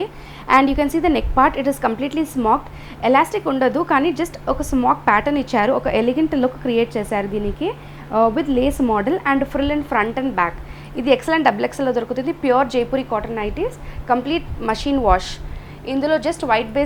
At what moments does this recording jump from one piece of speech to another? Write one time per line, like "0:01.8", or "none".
none